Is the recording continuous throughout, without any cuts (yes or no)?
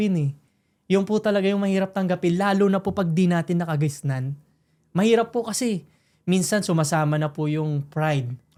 yes